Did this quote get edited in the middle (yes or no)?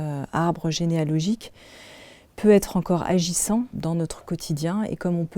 yes